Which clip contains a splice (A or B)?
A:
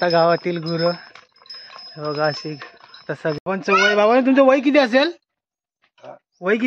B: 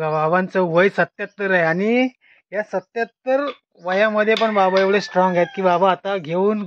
A